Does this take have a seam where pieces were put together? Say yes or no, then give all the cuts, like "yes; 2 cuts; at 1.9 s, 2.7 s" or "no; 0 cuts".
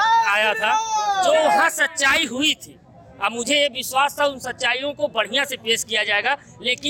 no; 0 cuts